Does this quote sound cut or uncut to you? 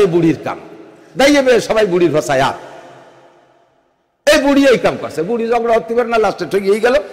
uncut